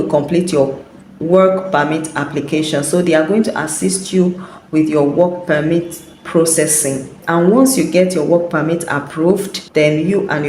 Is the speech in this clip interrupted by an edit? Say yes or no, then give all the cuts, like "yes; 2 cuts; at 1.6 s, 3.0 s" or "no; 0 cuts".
yes; 2 cuts; at 7.2 s, 9.6 s